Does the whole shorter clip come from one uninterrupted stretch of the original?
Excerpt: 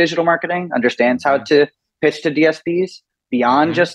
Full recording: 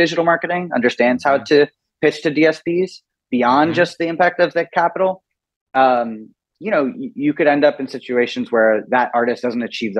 yes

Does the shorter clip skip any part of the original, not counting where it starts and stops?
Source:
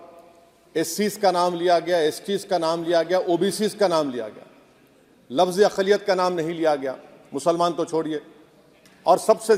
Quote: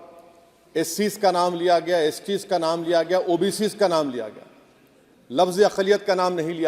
no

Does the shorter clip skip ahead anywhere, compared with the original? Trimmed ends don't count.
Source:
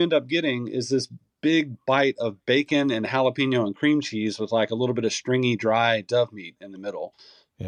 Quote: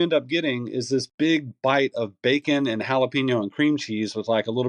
yes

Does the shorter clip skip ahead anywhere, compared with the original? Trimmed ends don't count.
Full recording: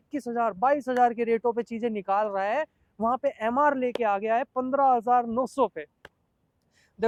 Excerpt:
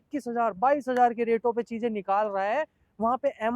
no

